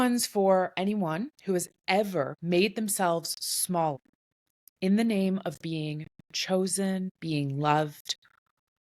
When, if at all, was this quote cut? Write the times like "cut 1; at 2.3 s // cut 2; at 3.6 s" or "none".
cut 1; at 1.3 s // cut 2; at 2.4 s // cut 3; at 4.0 s